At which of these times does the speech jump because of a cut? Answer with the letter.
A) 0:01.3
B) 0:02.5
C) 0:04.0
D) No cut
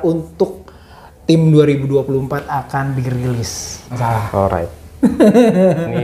C